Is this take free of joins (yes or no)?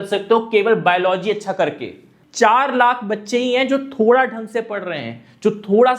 no